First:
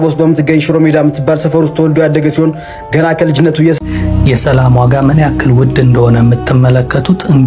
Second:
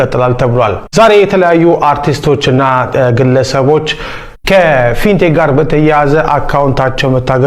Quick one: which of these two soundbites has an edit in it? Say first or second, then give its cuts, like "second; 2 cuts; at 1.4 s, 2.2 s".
first; 1 cut; at 3.8 s